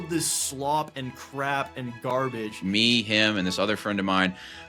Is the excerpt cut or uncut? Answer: cut